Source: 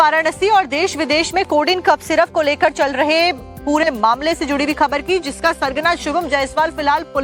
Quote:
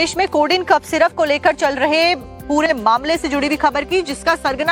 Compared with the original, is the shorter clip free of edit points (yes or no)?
yes